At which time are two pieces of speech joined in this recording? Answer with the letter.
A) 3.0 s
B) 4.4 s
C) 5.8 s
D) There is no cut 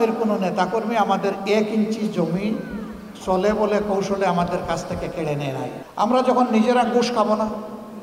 C